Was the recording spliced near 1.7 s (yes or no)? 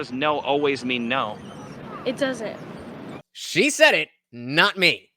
no